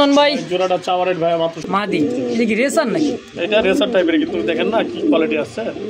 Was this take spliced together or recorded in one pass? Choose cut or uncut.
cut